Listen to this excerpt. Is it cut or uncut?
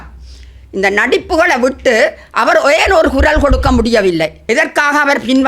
cut